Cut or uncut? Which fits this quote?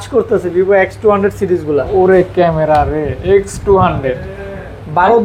uncut